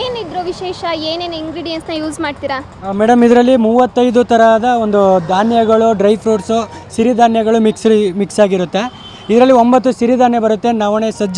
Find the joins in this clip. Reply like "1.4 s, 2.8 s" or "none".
none